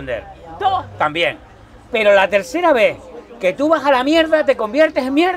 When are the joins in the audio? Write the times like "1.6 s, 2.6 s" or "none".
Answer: none